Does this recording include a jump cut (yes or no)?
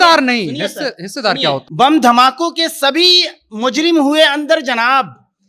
yes